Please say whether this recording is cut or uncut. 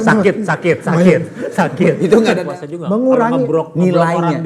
cut